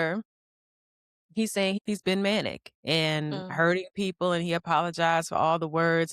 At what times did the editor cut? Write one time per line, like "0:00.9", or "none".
0:01.8